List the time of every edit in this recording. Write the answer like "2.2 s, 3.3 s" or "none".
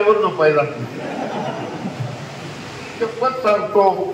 3.1 s